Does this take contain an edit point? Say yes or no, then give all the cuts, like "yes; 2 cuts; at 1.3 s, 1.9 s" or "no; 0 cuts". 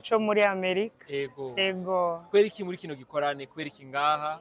no; 0 cuts